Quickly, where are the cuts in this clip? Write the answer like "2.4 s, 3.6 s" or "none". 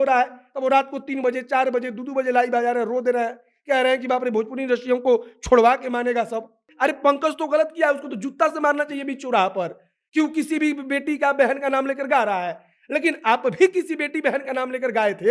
6.7 s